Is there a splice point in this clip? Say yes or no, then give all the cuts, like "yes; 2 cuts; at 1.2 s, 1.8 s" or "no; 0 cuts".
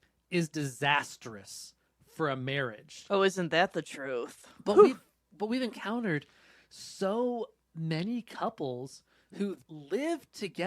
yes; 1 cut; at 9.6 s